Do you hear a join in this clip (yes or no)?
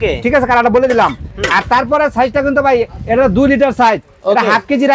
no